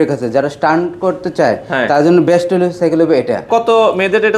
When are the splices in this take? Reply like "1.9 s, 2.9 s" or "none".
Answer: 3.4 s

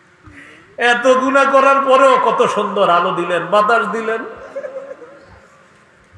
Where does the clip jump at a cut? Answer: none

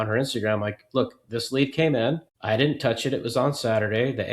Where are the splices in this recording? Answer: 2.3 s

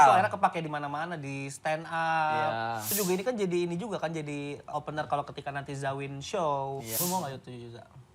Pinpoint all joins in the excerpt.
2.9 s, 4.7 s, 6.9 s

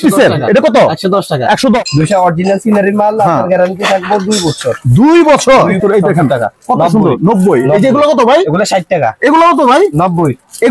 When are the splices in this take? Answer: 1.8 s, 5.7 s

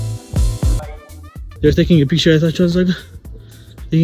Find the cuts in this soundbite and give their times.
0.9 s

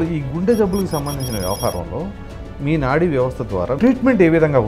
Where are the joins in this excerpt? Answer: 3.8 s

